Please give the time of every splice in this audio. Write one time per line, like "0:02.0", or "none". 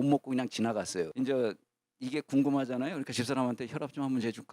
0:01.1